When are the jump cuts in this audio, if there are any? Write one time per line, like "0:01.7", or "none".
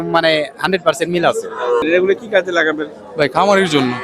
0:01.8